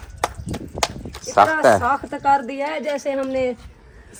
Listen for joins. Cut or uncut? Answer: uncut